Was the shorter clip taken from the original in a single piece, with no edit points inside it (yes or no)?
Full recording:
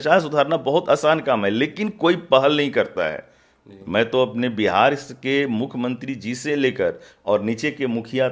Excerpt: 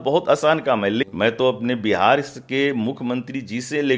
no